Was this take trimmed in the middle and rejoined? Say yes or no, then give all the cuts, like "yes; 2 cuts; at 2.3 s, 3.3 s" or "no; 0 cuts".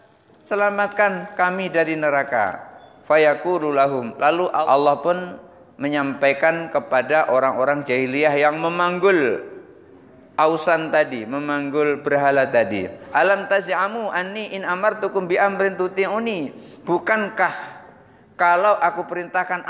yes; 2 cuts; at 4.6 s, 13.0 s